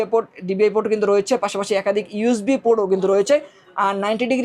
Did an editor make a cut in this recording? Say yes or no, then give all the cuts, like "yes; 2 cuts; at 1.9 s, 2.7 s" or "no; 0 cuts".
no; 0 cuts